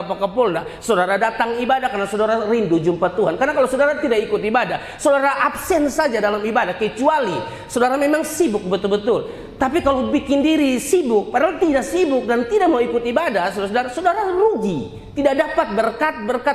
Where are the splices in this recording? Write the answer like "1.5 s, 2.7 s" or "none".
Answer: none